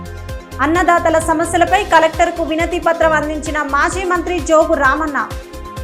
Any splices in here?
no; 0 cuts

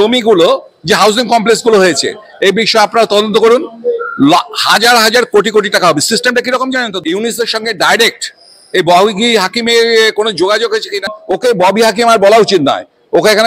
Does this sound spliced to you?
yes; 2 cuts; at 6.9 s, 11.0 s

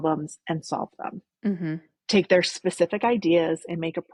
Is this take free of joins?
yes; 0 cuts

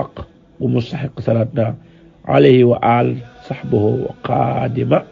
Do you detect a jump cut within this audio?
no; 0 cuts

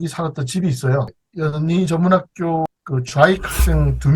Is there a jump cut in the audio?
yes; 2 cuts; at 1.2 s, 2.7 s

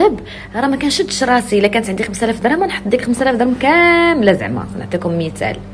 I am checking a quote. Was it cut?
no; 0 cuts

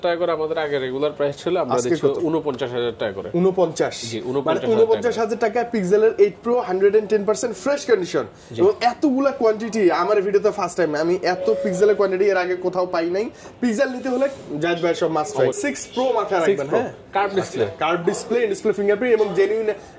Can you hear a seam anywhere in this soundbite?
yes; 1 cut; at 15.5 s

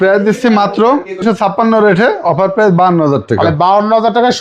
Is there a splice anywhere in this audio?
yes; 1 cut; at 1.2 s

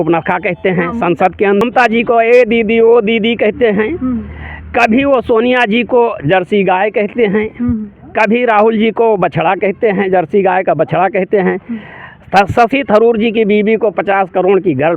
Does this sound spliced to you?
yes; 1 cut; at 1.6 s

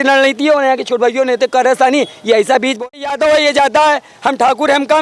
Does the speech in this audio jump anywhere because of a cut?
yes; 1 cut; at 2.7 s

